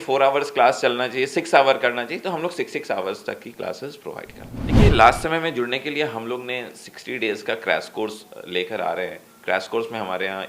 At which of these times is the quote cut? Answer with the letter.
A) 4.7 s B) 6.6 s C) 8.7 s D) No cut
A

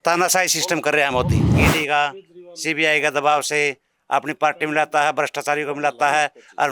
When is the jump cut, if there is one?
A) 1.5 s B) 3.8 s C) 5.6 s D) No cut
A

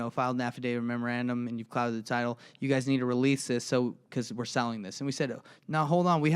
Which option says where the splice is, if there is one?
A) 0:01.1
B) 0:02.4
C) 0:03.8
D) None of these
D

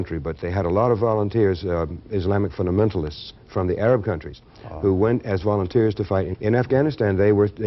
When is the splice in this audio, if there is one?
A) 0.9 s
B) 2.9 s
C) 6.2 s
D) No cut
C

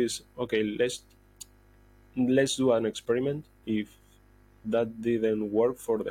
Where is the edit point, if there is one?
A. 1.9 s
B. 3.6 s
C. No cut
B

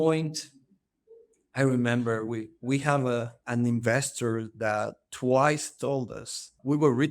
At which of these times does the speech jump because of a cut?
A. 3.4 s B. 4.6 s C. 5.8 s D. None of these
A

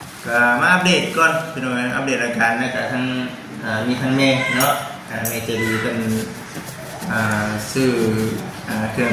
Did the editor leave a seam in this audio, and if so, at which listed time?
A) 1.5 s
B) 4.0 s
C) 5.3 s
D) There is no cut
D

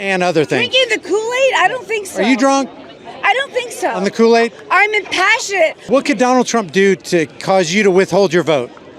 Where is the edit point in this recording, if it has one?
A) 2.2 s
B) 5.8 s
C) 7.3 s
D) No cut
B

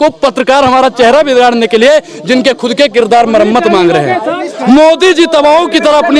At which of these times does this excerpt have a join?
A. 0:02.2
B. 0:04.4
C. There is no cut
B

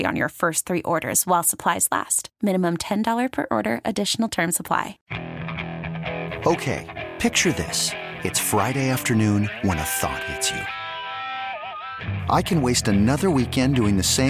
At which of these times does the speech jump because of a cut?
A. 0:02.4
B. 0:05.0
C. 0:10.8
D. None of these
B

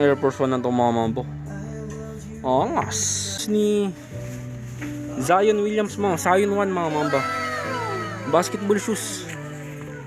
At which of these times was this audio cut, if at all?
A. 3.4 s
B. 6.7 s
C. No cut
A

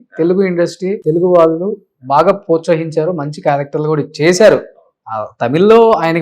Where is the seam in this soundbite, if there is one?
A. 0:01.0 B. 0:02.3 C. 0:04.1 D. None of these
A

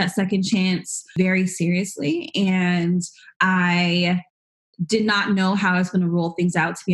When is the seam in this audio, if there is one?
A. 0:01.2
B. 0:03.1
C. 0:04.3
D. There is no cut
A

